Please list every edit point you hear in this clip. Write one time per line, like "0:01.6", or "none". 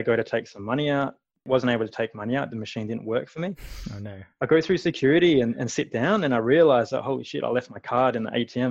0:01.5